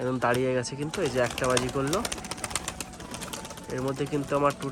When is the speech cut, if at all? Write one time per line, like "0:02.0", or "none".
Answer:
none